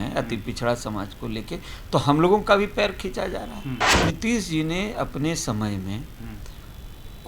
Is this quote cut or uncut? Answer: cut